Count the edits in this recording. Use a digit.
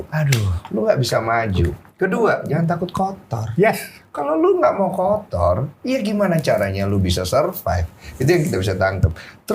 0